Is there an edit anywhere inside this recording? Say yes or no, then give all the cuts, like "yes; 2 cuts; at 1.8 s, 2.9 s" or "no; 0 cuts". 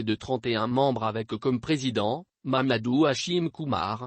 no; 0 cuts